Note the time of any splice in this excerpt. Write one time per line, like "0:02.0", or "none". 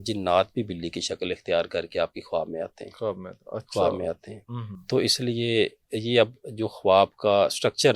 none

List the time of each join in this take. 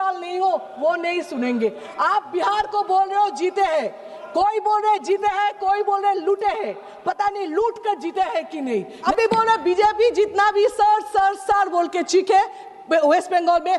0:01.8
0:09.0

